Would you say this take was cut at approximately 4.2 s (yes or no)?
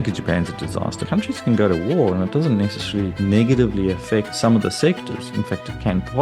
no